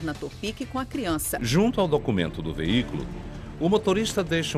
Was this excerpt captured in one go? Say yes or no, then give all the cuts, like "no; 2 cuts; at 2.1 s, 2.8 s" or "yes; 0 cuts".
no; 1 cut; at 1.4 s